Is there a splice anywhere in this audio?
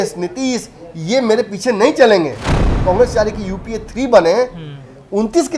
yes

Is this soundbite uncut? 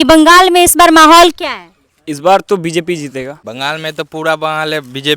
no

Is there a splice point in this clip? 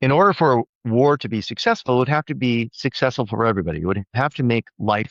no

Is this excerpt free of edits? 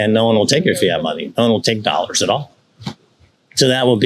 yes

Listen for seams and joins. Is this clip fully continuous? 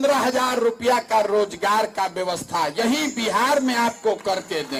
yes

